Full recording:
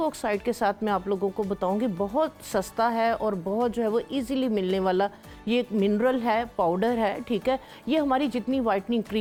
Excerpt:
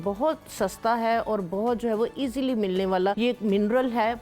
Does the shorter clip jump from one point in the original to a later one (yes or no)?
yes